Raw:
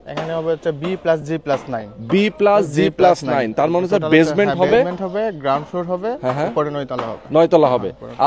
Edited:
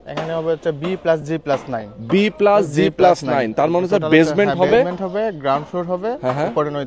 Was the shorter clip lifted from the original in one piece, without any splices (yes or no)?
yes